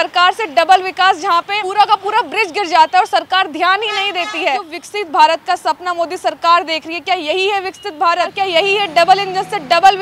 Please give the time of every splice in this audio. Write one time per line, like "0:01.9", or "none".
0:01.6
0:04.8
0:08.3